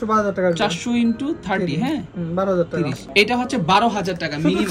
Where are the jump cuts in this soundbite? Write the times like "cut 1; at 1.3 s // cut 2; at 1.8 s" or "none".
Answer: none